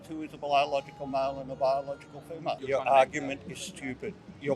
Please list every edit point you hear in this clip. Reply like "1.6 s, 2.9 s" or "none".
2.6 s

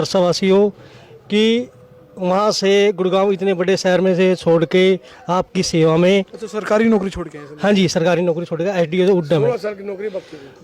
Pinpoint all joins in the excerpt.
none

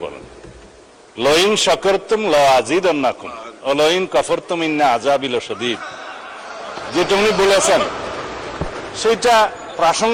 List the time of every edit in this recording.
none

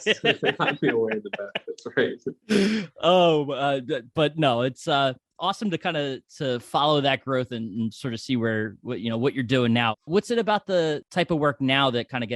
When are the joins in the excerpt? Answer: 10.0 s, 11.0 s

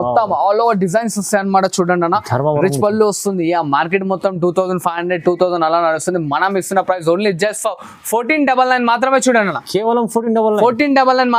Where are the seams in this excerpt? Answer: none

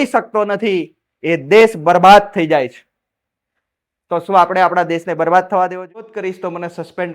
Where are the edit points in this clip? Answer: 6.1 s

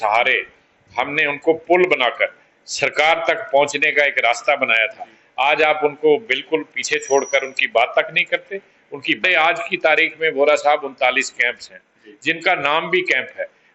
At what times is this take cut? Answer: 9.2 s

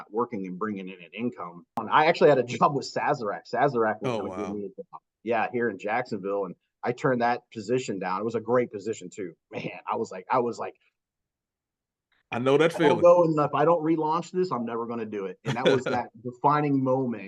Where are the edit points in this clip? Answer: 1.8 s

